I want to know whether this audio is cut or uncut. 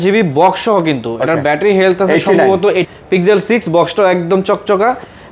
cut